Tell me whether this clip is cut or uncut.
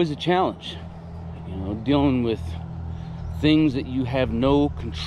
uncut